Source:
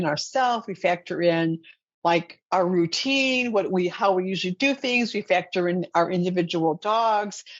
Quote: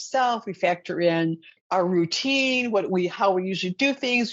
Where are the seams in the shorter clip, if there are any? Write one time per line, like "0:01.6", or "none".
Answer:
0:01.6